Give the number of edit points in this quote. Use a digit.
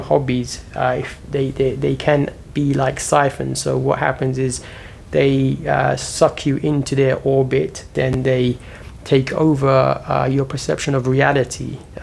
1